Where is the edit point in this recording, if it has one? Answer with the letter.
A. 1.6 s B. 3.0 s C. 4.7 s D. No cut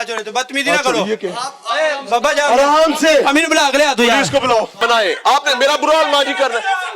C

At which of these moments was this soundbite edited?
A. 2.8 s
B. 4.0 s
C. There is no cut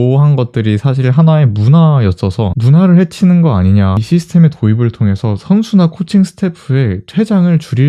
B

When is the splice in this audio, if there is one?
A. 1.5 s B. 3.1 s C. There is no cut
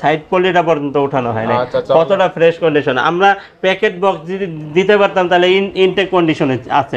C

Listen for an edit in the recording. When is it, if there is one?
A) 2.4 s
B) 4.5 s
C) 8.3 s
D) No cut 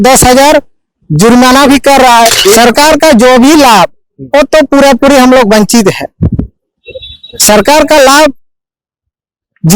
A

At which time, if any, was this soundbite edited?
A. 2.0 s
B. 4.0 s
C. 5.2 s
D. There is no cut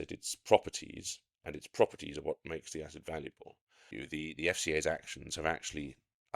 B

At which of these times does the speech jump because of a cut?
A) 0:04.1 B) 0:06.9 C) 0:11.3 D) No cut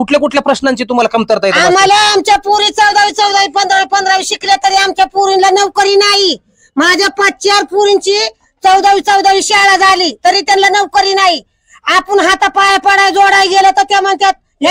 D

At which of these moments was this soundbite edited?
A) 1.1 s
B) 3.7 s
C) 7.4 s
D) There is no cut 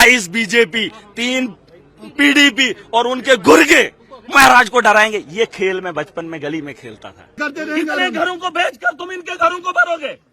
C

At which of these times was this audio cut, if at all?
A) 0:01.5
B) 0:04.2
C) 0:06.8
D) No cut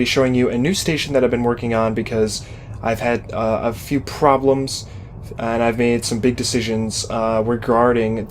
C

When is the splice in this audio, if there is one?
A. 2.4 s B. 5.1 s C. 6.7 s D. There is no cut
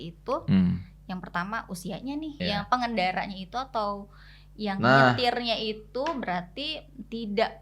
A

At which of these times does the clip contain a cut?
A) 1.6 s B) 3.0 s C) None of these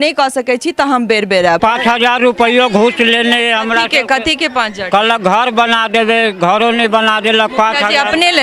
A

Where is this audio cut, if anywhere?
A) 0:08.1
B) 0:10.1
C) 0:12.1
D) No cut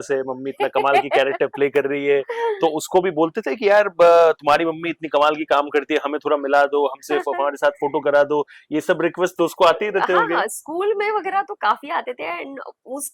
D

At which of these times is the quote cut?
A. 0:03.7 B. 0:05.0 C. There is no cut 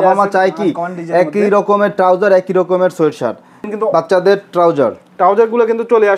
A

